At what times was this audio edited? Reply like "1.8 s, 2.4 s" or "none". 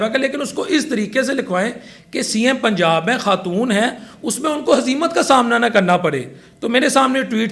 none